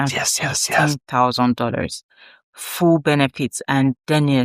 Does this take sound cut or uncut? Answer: uncut